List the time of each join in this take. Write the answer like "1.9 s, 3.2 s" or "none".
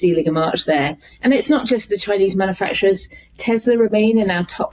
none